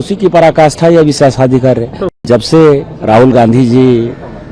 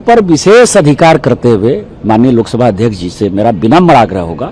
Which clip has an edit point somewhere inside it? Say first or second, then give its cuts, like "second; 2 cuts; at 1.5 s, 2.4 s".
first; 1 cut; at 2.1 s